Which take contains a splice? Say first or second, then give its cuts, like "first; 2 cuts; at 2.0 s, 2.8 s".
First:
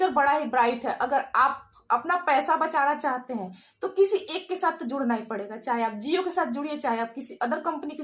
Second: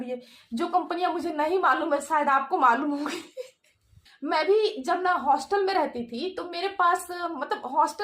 second; 1 cut; at 4.1 s